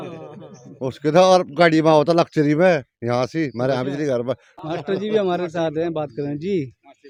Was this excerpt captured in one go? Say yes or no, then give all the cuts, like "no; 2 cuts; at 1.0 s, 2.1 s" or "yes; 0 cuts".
yes; 0 cuts